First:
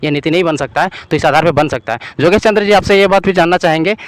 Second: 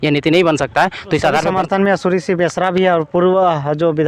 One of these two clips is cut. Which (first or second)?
second